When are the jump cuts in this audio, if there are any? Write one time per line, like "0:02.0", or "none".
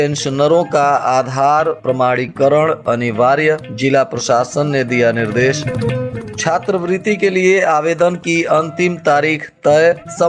none